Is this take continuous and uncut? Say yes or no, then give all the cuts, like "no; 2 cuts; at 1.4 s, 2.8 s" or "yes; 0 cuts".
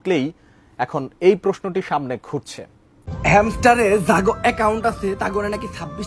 no; 1 cut; at 3.0 s